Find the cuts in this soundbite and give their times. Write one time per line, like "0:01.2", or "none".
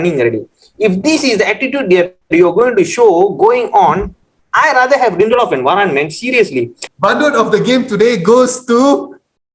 0:06.9